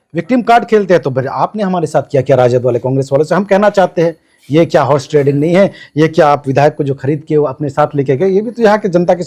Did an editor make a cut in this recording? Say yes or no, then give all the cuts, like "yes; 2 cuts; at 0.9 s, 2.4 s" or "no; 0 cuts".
no; 0 cuts